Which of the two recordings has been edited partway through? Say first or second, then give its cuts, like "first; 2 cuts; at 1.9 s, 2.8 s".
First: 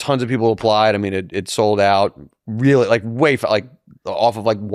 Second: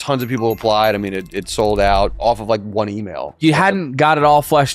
second; 2 cuts; at 2.2 s, 3.4 s